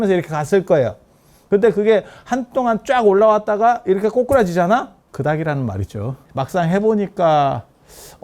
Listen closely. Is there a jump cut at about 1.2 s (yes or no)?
no